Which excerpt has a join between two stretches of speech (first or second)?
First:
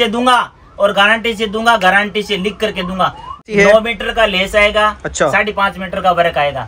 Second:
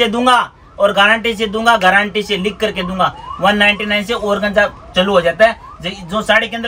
first